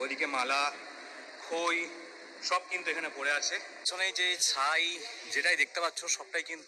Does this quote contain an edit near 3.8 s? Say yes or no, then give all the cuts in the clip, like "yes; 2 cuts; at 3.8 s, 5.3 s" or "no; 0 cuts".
yes; 1 cut; at 3.8 s